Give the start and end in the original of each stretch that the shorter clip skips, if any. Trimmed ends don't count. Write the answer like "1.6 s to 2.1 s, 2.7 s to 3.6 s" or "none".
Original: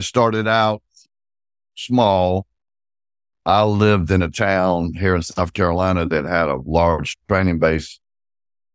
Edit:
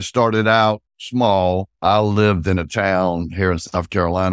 0.9 s to 1.7 s, 2.5 s to 3.4 s